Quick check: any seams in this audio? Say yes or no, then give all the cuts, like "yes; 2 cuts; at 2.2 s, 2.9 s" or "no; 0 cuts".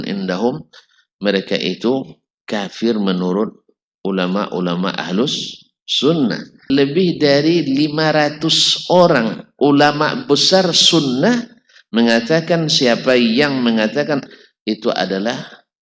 yes; 2 cuts; at 6.6 s, 14.2 s